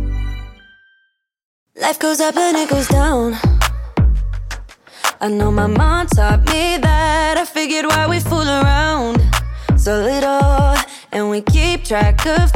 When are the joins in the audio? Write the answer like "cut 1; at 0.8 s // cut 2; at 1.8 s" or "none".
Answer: cut 1; at 1.9 s